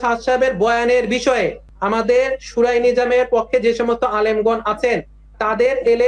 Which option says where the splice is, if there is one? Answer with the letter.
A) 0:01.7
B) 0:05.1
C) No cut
A